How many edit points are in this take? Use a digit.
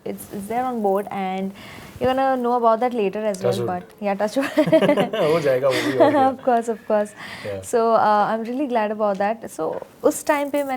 0